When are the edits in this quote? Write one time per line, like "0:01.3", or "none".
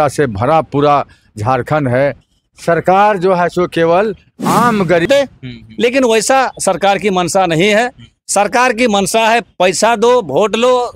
0:05.1